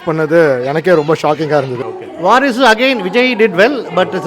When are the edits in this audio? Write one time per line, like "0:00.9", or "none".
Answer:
0:01.8